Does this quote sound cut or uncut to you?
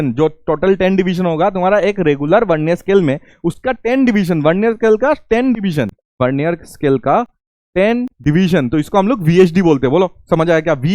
cut